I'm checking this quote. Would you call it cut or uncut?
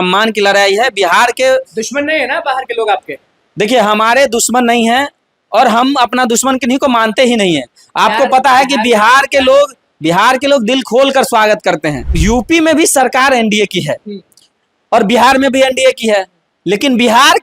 cut